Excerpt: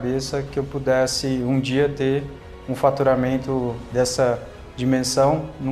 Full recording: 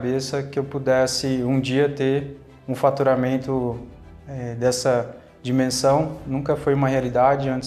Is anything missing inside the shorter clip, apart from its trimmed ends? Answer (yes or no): yes